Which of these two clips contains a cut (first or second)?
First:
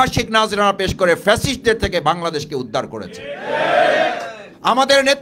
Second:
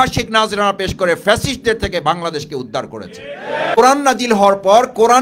second